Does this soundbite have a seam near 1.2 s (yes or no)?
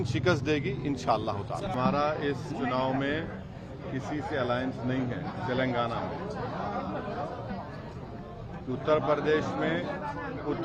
yes